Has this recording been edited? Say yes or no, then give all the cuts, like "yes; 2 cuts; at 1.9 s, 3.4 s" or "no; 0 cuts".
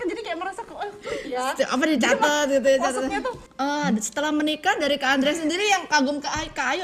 yes; 1 cut; at 3.4 s